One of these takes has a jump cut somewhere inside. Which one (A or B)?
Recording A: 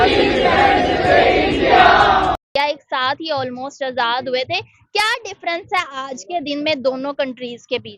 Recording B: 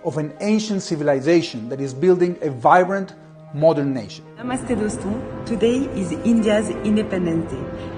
A